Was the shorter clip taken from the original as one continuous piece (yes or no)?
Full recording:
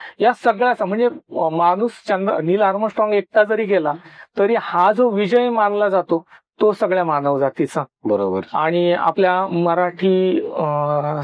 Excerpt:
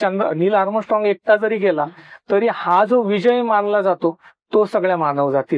yes